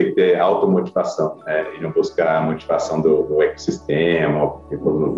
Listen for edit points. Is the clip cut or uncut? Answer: uncut